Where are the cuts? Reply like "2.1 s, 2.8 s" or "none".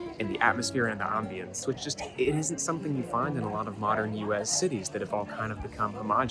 1.6 s